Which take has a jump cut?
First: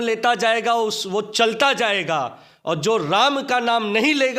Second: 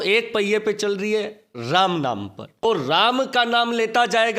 second; 1 cut; at 2.6 s

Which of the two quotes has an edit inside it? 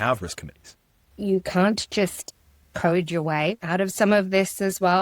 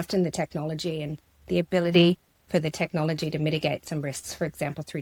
first; 2 cuts; at 1.1 s, 3.6 s

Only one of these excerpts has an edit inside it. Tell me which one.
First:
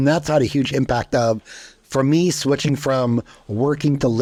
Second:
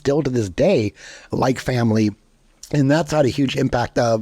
second; 1 cut; at 1.3 s

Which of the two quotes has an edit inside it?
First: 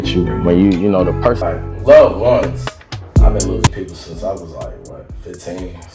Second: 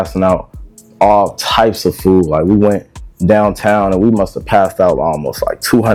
first; 1 cut; at 1.4 s

